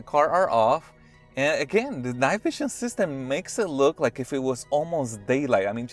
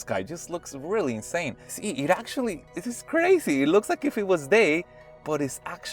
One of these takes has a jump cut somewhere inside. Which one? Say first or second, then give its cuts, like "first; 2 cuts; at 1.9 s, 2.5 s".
second; 1 cut; at 1.7 s